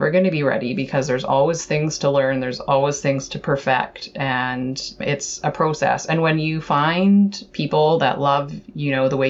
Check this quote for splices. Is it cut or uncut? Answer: uncut